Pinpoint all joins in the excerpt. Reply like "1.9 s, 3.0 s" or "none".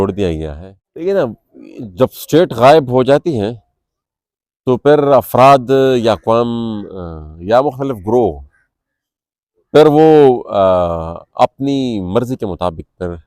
1.0 s